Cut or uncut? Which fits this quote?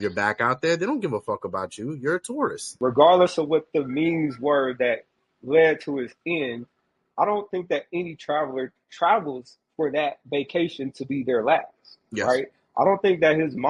cut